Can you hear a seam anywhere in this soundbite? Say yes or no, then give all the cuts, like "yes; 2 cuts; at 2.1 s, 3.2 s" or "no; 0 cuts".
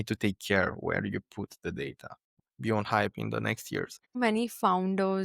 yes; 2 cuts; at 2.4 s, 4.1 s